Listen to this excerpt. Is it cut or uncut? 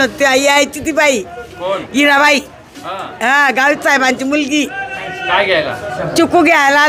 uncut